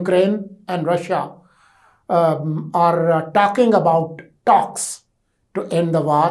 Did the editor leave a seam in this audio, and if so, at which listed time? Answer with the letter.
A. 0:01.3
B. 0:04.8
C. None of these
C